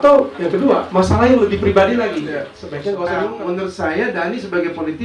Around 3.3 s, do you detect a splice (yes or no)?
yes